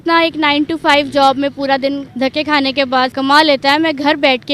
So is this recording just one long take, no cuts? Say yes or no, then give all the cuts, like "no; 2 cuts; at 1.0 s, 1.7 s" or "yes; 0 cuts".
no; 2 cuts; at 2.1 s, 3.1 s